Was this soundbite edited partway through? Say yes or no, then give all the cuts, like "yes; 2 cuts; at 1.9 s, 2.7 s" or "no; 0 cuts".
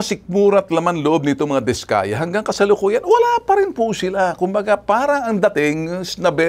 no; 0 cuts